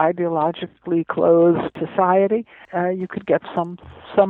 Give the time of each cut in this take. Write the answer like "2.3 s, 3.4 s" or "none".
1.8 s, 2.6 s